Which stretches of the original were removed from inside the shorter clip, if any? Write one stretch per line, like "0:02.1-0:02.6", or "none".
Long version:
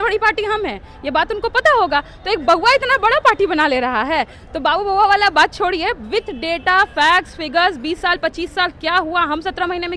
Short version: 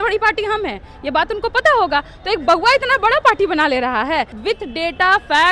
0:04.4-0:06.0